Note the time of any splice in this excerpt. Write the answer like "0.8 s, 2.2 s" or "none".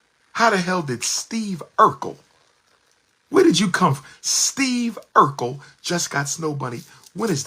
none